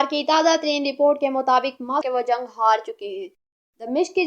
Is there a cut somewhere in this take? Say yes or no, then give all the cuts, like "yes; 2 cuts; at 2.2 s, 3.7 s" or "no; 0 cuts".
yes; 1 cut; at 2.1 s